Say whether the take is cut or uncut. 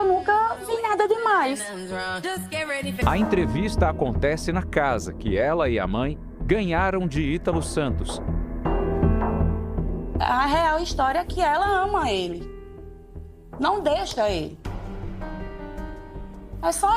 cut